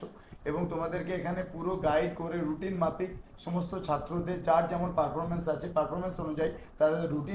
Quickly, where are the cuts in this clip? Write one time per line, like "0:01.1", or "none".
none

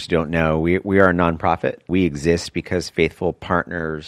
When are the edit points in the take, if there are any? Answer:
0:01.9

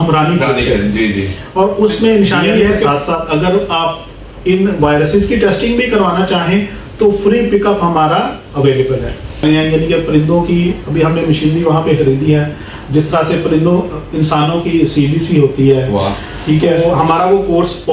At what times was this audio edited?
0:02.9
0:09.4
0:16.7

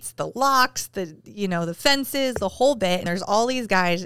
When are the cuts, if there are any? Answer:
0:03.0

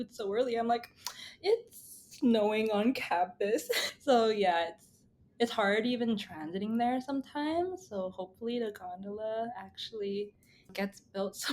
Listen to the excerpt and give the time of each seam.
0:03.8
0:10.7

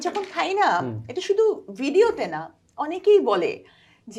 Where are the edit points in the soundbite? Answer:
none

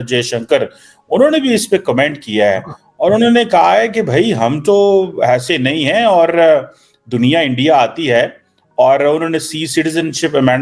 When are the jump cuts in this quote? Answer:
none

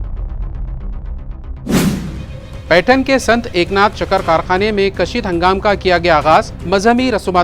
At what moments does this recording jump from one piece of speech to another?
0:02.3

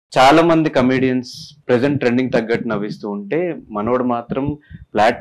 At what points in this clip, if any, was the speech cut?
0:01.5

